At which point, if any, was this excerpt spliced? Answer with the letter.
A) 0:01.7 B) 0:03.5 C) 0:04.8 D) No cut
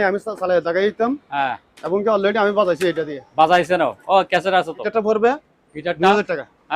C